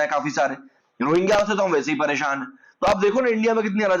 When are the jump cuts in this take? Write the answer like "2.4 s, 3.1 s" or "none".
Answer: none

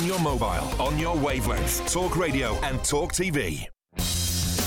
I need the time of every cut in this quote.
3.8 s

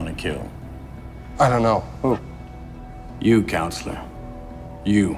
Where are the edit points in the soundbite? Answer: none

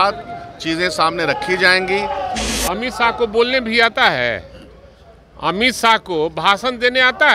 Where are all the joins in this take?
2.5 s

